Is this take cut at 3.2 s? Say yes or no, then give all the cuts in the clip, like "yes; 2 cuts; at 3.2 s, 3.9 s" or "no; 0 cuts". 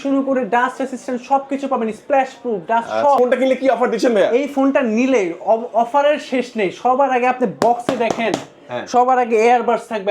yes; 1 cut; at 3.2 s